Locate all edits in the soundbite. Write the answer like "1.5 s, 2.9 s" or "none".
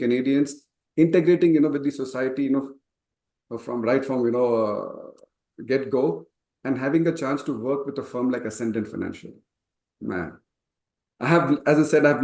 none